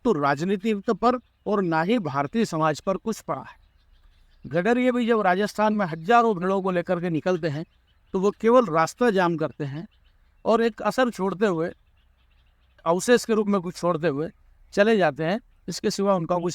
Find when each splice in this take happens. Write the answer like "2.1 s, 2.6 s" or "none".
12.8 s